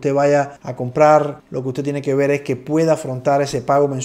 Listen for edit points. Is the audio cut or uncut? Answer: uncut